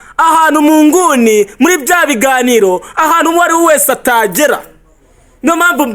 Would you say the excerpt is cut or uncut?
uncut